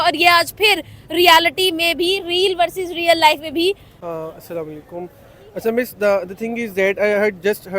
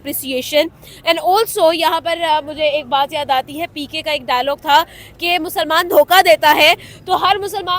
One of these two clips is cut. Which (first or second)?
first